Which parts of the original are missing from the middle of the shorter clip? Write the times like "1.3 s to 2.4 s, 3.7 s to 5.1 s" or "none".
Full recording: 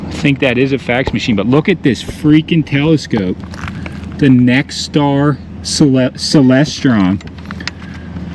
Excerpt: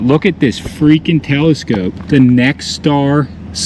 3.4 s to 4.1 s